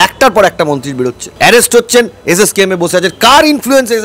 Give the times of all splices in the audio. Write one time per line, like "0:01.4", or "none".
0:01.2

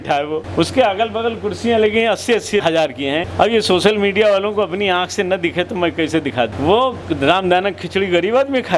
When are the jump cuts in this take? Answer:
none

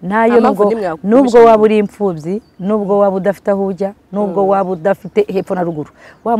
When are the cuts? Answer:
none

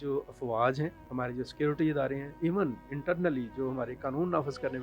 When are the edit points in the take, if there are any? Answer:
0:01.0

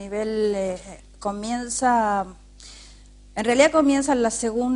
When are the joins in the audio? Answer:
none

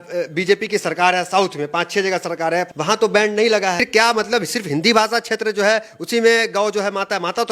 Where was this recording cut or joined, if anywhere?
0:02.7
0:03.9

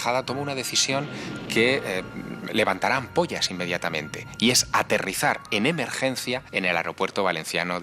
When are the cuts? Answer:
0:06.5

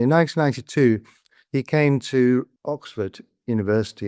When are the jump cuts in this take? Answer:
0:02.5

